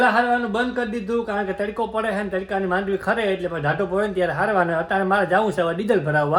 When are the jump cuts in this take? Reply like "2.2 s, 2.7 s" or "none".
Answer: none